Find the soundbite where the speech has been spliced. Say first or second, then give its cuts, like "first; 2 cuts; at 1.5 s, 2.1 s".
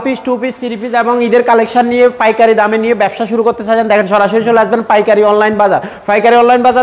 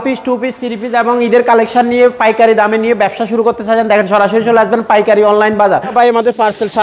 second; 1 cut; at 5.9 s